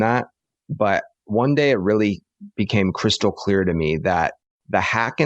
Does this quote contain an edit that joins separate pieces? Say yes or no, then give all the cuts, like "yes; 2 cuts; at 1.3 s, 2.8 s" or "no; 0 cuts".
no; 0 cuts